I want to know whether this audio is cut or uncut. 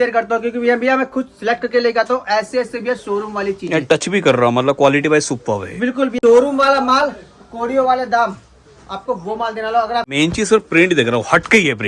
cut